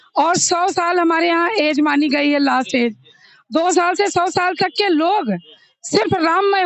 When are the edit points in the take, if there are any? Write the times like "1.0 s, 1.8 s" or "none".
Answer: none